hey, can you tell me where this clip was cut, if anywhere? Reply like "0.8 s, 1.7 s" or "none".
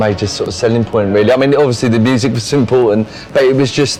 none

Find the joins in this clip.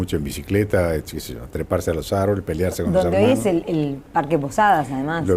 1.7 s

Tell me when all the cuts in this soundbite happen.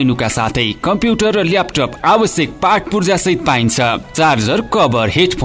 none

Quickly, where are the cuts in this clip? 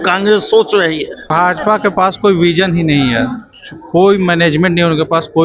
1.3 s

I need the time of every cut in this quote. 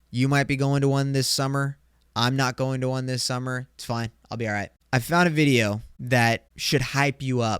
4.7 s, 5.9 s, 6.5 s

